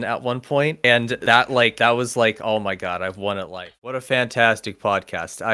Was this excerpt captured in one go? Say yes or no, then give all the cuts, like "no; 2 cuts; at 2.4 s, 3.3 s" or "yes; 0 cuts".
no; 1 cut; at 3.7 s